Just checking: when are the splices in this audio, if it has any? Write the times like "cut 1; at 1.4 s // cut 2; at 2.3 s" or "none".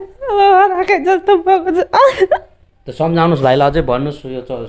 none